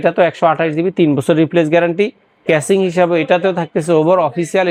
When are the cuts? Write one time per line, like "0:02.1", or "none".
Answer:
none